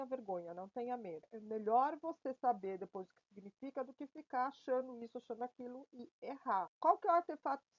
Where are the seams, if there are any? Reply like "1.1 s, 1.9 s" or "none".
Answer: 1.3 s, 6.7 s